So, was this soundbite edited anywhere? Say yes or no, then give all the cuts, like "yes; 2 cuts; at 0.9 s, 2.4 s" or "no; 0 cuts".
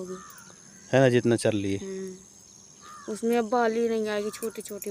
no; 0 cuts